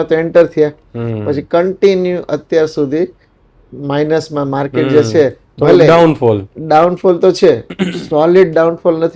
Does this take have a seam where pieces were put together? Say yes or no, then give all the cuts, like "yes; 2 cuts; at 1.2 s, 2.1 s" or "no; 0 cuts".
no; 0 cuts